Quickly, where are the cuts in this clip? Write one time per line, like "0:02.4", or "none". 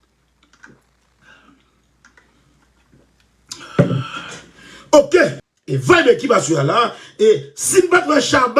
none